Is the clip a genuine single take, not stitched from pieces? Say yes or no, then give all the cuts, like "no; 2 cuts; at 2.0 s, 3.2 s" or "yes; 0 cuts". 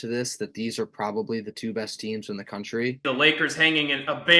no; 1 cut; at 3.0 s